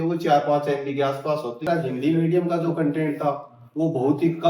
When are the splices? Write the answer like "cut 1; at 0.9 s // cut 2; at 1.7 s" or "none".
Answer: cut 1; at 1.6 s